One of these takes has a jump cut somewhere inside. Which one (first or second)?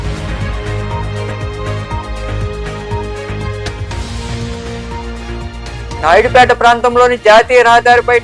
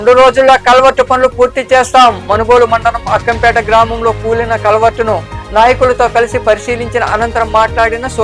first